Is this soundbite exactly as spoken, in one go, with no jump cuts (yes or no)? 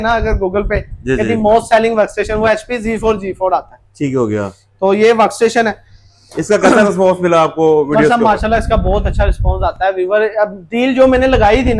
yes